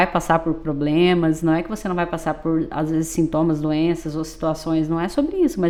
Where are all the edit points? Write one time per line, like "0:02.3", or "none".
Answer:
none

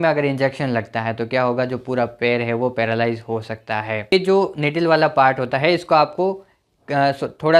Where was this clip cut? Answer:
0:04.1

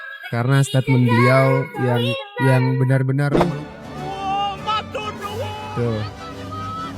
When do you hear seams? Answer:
0:03.4

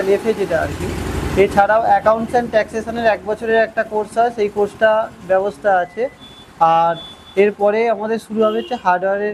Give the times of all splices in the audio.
none

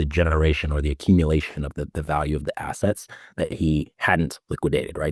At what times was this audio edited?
none

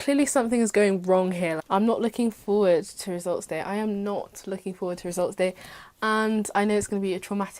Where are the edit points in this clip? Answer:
0:01.6

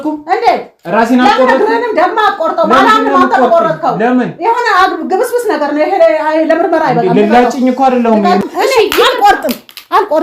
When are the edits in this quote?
0:08.4

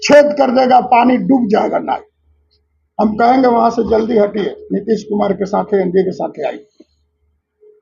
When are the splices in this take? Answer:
none

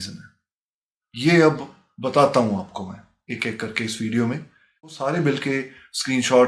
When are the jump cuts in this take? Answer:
0:04.9

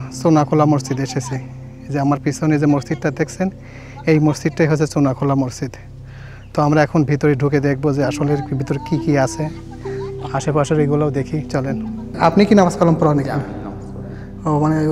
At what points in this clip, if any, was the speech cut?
0:12.1

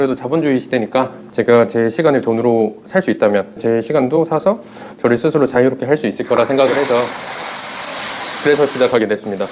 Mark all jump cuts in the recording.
0:01.2
0:03.6

